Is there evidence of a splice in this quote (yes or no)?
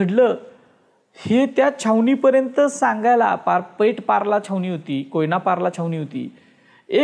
no